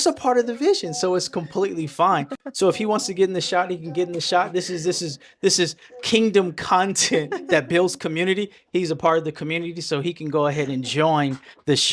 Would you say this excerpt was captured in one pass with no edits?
yes; 0 cuts

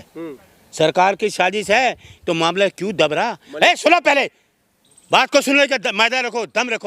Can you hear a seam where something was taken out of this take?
no; 0 cuts

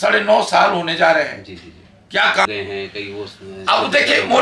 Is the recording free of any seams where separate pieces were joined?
no; 1 cut; at 2.5 s

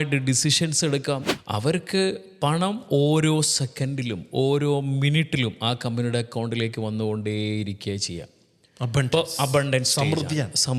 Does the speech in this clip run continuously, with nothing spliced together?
no; 1 cut; at 1.4 s

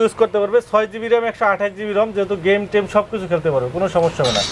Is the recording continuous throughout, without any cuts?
yes; 0 cuts

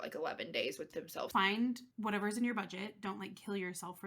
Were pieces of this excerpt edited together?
yes; 2 cuts; at 1.3 s, 1.9 s

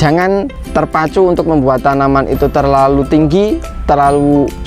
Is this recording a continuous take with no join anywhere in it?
no; 1 cut; at 3.7 s

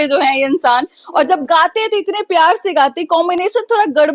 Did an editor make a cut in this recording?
no; 0 cuts

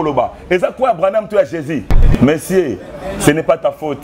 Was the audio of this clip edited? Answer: yes; 1 cut; at 2.0 s

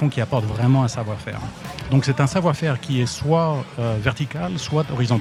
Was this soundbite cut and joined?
no; 0 cuts

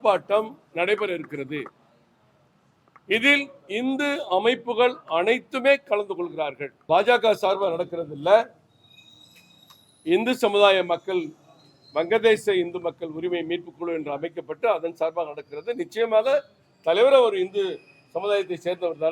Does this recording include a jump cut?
yes; 1 cut; at 6.7 s

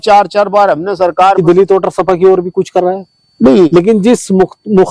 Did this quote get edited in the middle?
yes; 2 cuts; at 1.3 s, 3.7 s

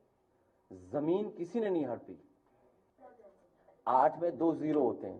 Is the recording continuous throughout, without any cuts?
no; 1 cut; at 2.8 s

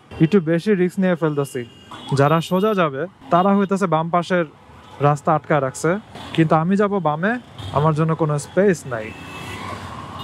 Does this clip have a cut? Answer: yes; 1 cut; at 1.8 s

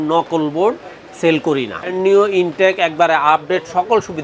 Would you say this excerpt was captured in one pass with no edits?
no; 1 cut; at 1.9 s

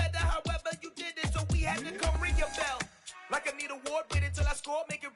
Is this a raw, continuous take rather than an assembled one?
yes; 0 cuts

